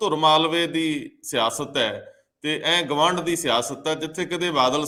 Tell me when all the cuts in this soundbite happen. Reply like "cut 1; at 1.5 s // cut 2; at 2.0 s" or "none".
none